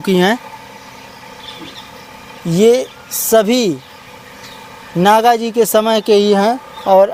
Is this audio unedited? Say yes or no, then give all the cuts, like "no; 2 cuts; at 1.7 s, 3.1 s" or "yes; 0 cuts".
yes; 0 cuts